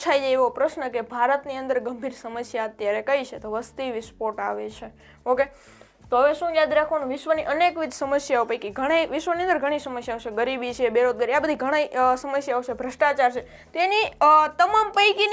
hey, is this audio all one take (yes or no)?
yes